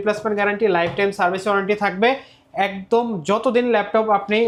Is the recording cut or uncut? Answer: uncut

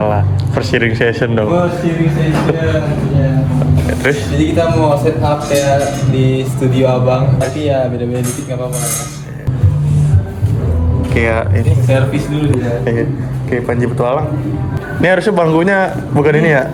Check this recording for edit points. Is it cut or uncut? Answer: uncut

